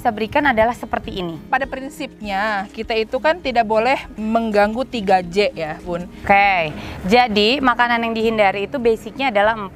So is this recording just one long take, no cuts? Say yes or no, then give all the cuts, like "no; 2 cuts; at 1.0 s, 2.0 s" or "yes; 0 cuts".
no; 3 cuts; at 1.4 s, 4.2 s, 6.3 s